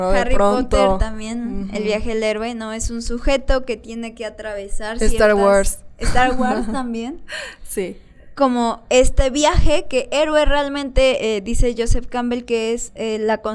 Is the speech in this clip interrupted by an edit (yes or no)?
no